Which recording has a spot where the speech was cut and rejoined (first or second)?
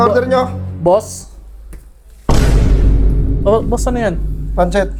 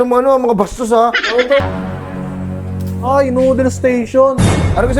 second